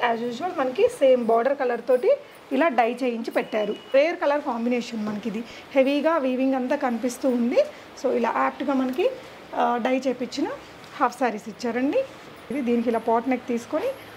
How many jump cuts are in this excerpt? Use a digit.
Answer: 2